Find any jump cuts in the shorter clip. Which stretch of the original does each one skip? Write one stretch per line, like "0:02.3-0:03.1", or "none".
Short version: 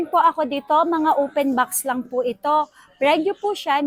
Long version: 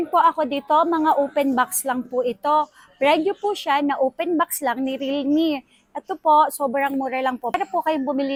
none